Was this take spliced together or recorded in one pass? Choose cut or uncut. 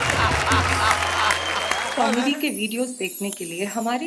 cut